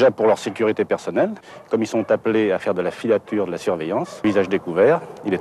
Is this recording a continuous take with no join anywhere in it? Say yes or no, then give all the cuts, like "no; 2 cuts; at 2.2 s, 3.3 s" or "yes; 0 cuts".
no; 1 cut; at 4.2 s